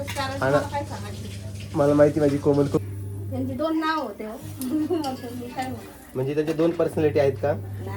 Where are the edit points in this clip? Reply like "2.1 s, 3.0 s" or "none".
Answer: 2.8 s

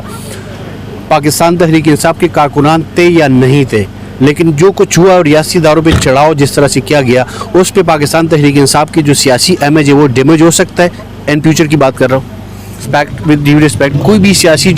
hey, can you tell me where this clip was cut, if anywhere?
12.9 s

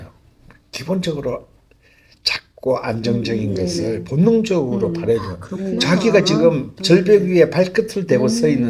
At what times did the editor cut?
none

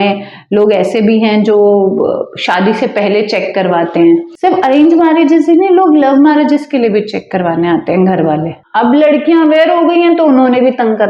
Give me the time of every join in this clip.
4.3 s, 8.6 s

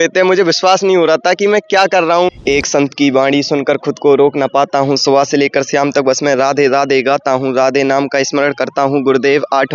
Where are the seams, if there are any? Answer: 2.3 s

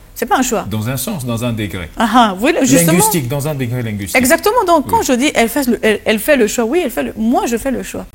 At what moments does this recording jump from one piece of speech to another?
none

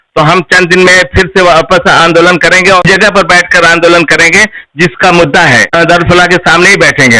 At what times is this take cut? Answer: 2.8 s, 5.7 s

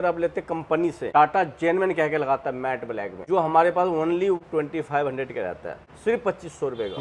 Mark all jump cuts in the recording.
1.1 s, 3.1 s, 4.4 s, 5.8 s

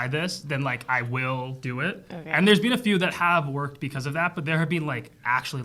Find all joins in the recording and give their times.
none

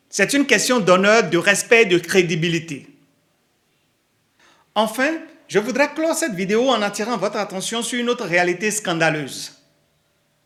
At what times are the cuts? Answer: none

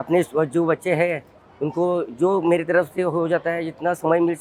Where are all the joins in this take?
none

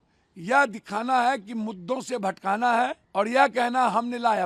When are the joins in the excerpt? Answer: 3.0 s

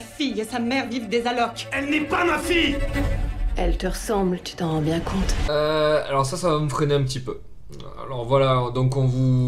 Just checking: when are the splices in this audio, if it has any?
none

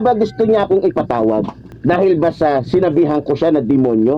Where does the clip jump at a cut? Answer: 1.6 s

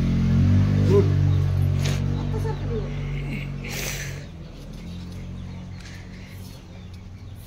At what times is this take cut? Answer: none

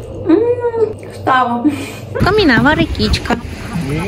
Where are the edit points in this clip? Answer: 1.1 s, 2.2 s

